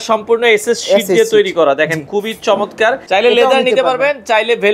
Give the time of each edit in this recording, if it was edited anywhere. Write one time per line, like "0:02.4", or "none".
0:03.0